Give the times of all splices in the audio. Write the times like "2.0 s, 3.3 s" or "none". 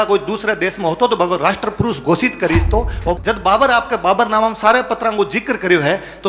3.2 s